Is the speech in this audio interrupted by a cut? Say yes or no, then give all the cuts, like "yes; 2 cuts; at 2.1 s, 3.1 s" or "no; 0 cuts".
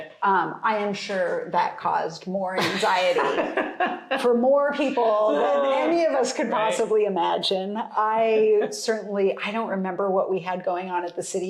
no; 0 cuts